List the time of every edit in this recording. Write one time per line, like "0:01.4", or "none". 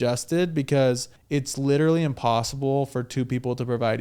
0:01.1